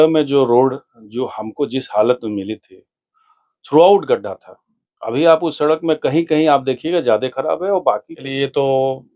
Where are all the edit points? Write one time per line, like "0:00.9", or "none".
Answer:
0:08.1